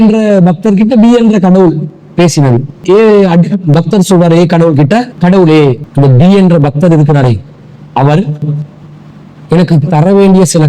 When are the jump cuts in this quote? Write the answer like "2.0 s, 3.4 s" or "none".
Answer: 2.8 s, 5.1 s, 5.9 s